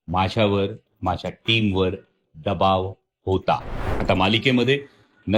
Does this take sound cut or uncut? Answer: cut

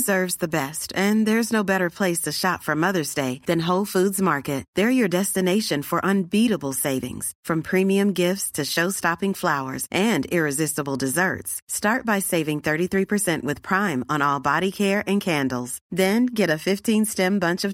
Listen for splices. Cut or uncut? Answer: uncut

